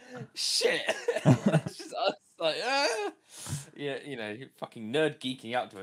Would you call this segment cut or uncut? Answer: uncut